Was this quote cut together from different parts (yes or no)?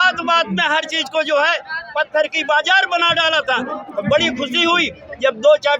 no